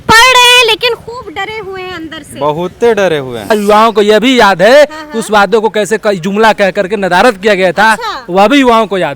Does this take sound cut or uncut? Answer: cut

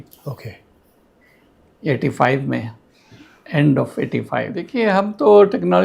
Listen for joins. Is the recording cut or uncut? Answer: cut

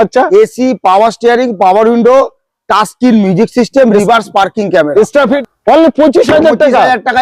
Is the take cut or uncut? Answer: cut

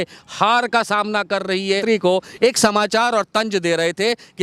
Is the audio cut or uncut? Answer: cut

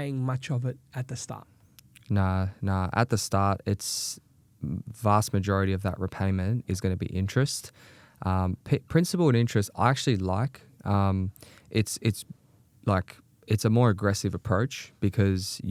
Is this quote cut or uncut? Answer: uncut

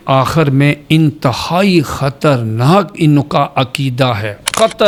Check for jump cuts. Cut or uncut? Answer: uncut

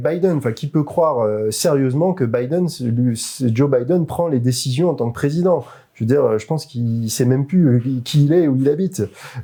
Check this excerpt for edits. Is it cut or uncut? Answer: uncut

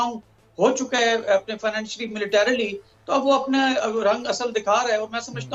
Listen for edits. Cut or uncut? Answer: uncut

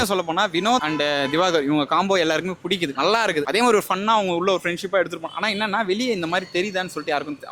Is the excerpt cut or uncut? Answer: cut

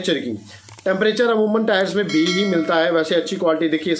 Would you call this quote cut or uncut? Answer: uncut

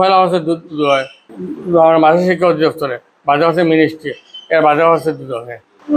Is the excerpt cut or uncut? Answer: uncut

